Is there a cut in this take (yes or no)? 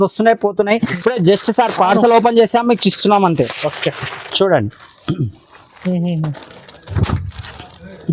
yes